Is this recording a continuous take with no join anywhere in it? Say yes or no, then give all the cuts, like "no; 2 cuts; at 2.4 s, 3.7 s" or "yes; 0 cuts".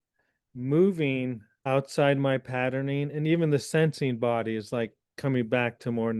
no; 1 cut; at 1.5 s